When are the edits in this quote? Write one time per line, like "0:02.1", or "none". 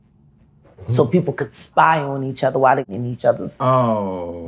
0:02.9